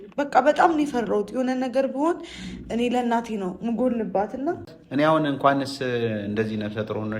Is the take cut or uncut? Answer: cut